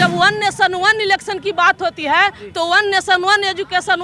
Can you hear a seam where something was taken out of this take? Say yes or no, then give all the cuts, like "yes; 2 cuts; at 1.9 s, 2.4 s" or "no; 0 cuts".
no; 0 cuts